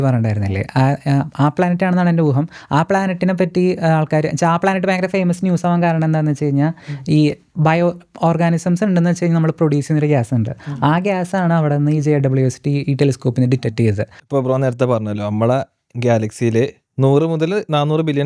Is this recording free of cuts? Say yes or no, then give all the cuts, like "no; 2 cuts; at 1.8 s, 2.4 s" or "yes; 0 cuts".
no; 1 cut; at 14.1 s